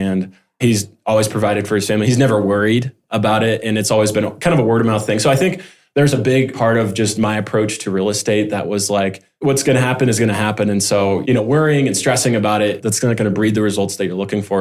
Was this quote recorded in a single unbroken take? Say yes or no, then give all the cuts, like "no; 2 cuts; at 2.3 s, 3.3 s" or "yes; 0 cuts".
no; 1 cut; at 9.3 s